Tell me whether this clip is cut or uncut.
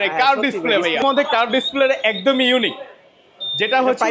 cut